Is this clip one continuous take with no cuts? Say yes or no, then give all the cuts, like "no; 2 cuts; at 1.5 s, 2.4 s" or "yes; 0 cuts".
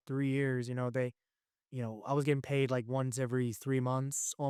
yes; 0 cuts